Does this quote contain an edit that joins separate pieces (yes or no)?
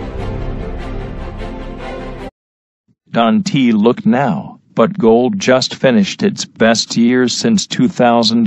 no